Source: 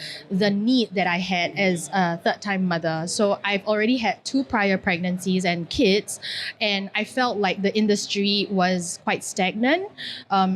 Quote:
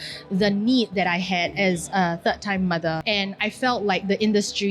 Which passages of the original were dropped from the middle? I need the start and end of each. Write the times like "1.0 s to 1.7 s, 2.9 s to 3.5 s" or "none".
3.0 s to 6.5 s

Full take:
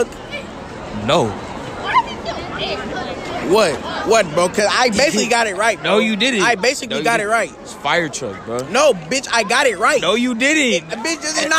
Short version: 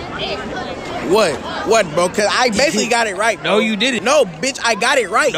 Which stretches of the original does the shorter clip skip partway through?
6.4 s to 8.7 s

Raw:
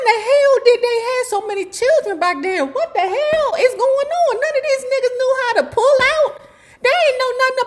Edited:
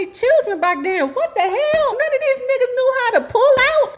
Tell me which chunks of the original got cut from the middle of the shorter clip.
3.5 s to 4.4 s

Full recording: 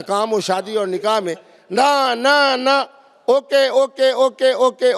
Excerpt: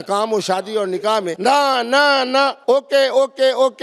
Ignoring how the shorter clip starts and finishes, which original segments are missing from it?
1.3 s to 1.6 s, 2.9 s to 3.2 s

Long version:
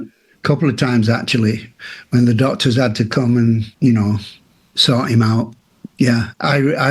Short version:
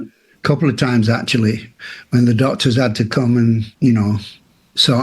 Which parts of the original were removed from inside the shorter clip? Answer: none

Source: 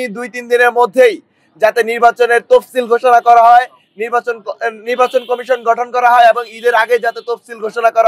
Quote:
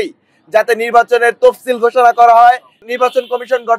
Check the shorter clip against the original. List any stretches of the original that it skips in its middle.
3.8 s to 4.7 s

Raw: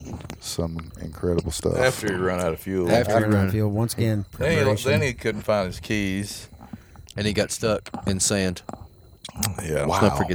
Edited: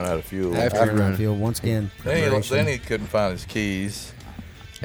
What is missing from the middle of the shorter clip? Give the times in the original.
none

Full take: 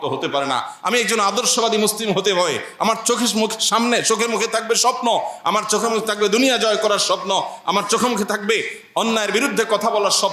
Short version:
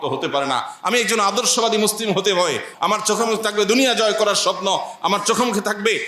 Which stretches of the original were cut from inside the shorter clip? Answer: 2.7 s to 5.3 s

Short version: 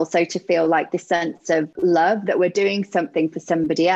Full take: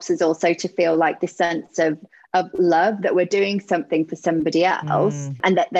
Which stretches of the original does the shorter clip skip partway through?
2.0 s to 2.5 s

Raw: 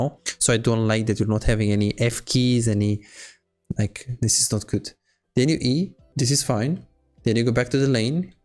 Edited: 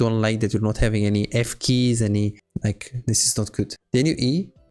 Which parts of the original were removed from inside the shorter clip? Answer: 3.1 s to 3.6 s, 4.9 s to 5.2 s

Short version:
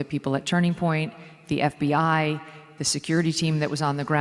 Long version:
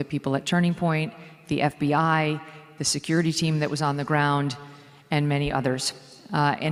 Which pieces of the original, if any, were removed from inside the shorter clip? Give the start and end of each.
none

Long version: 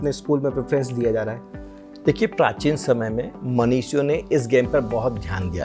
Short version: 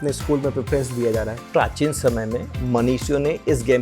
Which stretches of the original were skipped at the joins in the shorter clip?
1.5 s to 2.3 s

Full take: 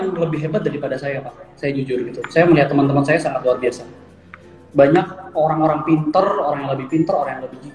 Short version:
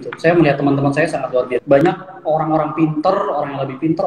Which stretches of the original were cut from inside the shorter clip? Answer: 3.9 s to 4.9 s

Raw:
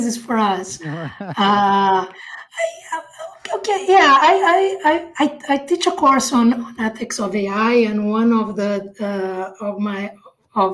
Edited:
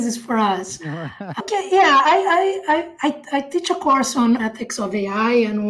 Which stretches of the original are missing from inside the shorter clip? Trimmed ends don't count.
1.4 s to 3.6 s, 6.6 s to 6.8 s

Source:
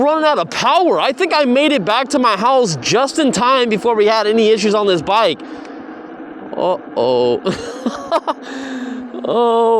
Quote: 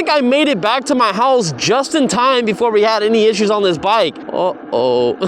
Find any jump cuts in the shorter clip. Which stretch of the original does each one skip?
5.5 s to 6.5 s

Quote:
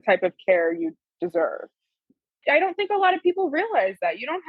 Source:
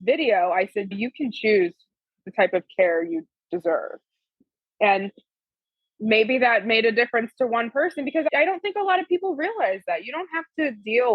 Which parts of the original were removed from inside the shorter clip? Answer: 4.8 s to 8.3 s

